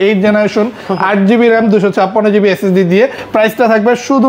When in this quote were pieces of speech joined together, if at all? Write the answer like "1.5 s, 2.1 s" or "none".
none